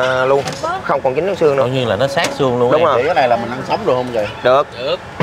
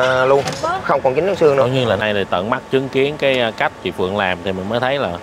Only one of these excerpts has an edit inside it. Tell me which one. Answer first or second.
second